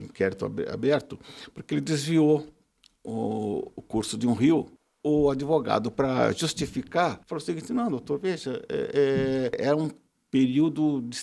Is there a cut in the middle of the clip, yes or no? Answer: yes